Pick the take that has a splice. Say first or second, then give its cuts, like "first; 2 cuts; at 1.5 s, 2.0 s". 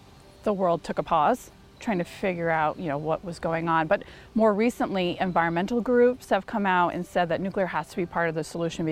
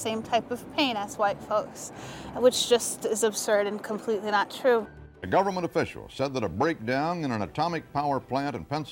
second; 1 cut; at 4.8 s